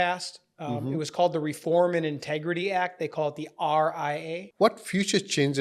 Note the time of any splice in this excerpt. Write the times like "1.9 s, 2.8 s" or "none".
4.4 s